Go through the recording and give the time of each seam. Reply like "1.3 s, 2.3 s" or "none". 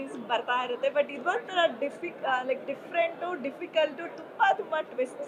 none